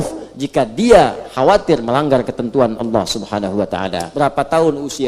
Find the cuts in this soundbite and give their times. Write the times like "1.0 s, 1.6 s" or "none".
4.0 s